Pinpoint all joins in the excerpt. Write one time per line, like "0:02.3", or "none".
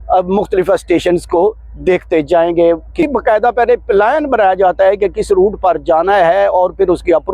0:03.0